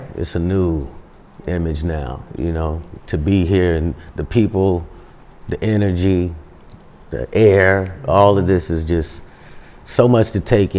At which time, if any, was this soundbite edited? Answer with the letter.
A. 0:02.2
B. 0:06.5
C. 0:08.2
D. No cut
D